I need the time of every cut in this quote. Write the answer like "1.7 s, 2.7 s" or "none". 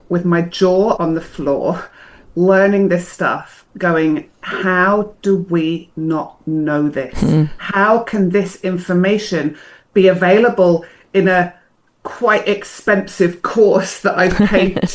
1.0 s